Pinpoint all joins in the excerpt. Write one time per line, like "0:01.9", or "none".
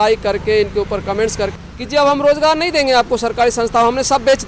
0:01.5